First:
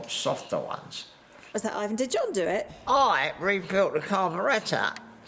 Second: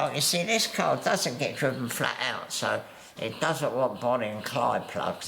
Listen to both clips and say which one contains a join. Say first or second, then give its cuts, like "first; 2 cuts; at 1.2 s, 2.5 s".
first; 1 cut; at 1.6 s